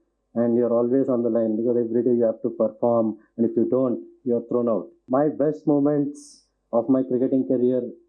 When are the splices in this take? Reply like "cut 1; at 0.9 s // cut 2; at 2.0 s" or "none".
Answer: cut 1; at 5.0 s